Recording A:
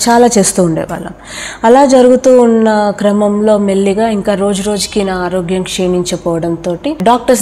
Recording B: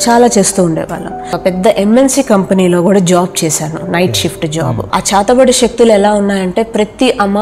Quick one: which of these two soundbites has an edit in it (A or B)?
B